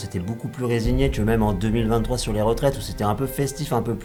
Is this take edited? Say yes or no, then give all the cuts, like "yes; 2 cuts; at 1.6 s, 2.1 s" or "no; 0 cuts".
no; 0 cuts